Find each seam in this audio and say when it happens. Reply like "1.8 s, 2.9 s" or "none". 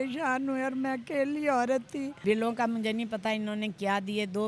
2.2 s